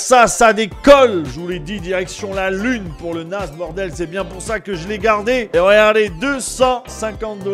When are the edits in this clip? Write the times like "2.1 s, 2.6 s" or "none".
5.5 s

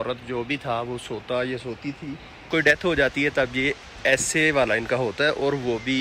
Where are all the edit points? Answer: 2.5 s

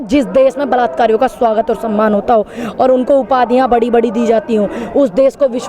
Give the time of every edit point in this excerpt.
none

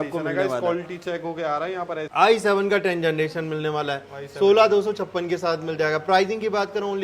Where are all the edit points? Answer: 2.1 s

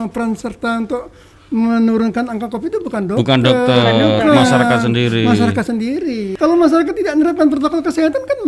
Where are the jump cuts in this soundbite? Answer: 6.3 s

